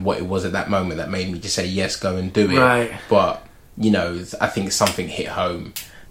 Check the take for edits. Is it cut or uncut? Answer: uncut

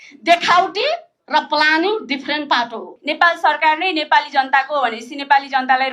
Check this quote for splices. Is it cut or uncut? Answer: cut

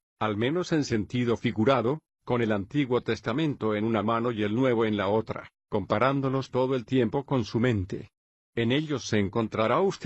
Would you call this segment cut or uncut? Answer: cut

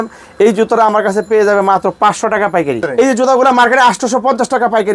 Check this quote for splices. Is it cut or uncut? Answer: cut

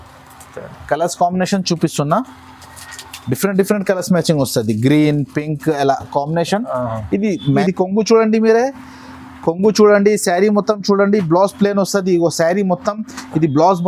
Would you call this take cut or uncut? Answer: cut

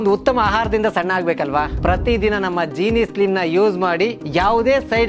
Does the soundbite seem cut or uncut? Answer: uncut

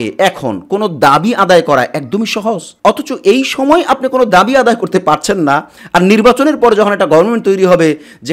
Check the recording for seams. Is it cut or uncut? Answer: cut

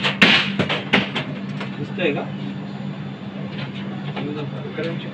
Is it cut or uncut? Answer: uncut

